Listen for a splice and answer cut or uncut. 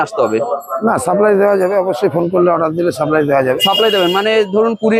uncut